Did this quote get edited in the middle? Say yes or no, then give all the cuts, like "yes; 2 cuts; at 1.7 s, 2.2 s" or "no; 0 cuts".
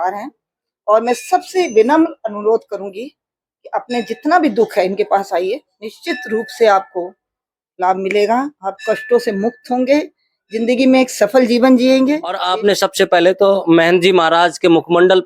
yes; 1 cut; at 12.4 s